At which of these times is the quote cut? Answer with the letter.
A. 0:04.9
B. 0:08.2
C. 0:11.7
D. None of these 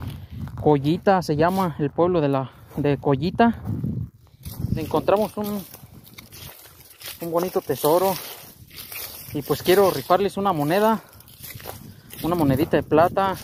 A